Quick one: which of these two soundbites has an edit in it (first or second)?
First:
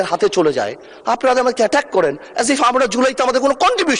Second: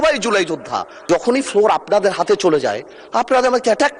second